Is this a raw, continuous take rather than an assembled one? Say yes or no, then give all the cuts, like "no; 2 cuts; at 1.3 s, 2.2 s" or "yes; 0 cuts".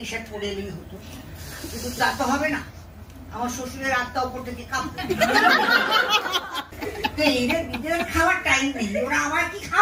no; 1 cut; at 6.7 s